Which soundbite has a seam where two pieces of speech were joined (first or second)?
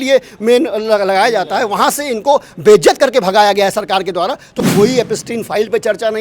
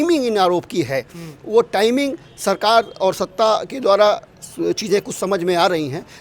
first